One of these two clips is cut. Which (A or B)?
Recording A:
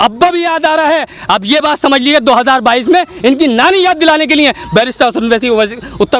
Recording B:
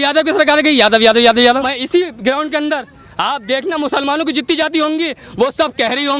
B